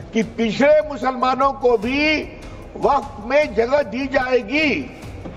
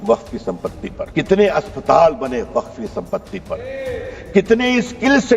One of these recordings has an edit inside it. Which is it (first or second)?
second